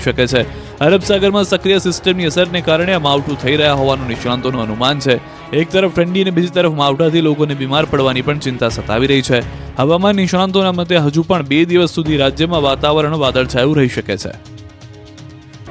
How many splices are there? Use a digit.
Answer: 1